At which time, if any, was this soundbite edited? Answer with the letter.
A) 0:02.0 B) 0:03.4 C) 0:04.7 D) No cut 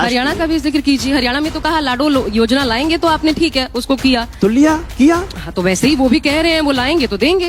D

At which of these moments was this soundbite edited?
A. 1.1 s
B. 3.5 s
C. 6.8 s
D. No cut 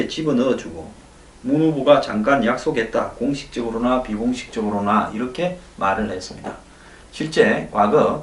C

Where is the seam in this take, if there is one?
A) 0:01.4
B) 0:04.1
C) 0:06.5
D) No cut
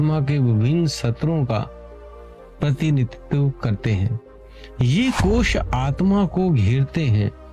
A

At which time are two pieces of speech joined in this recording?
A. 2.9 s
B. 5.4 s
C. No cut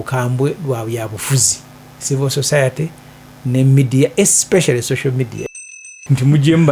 B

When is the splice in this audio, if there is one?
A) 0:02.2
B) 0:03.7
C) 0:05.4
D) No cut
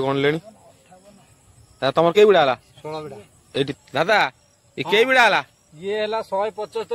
B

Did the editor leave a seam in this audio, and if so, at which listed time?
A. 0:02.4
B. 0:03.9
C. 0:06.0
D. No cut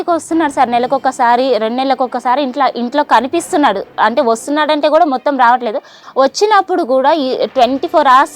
C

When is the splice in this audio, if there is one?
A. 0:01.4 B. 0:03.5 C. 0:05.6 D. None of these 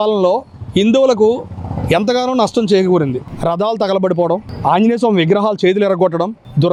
D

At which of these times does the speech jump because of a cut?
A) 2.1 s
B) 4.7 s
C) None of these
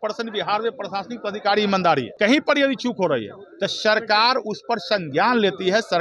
A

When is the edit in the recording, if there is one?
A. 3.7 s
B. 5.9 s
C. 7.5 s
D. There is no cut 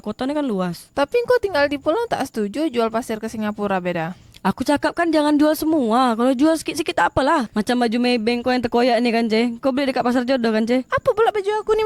C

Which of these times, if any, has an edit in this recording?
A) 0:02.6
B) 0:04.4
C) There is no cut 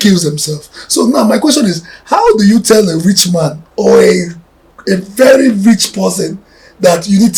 C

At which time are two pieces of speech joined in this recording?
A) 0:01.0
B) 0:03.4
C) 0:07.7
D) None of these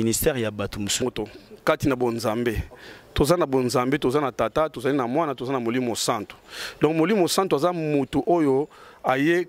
A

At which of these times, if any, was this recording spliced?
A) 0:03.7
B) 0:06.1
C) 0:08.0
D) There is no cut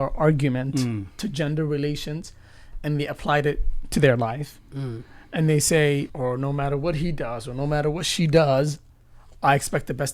B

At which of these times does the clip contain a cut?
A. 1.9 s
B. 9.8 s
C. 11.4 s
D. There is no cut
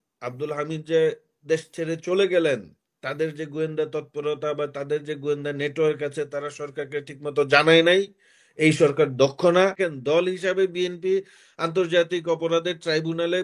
B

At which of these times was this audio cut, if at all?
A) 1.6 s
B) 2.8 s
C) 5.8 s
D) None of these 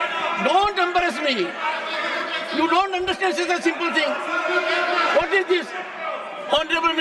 D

